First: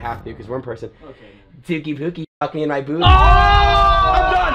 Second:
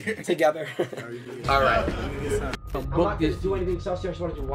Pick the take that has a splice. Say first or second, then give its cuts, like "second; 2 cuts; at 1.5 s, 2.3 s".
second; 1 cut; at 2.7 s